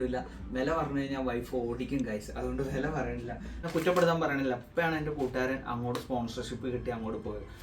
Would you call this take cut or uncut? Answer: cut